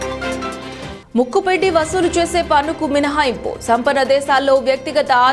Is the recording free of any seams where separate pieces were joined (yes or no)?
no